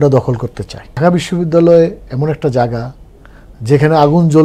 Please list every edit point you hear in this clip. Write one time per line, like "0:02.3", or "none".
0:00.9